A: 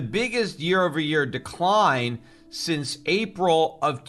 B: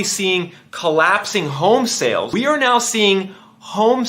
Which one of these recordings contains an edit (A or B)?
B